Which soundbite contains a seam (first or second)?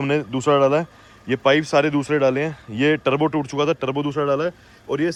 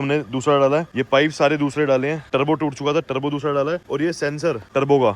second